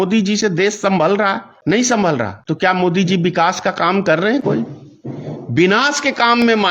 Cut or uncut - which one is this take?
cut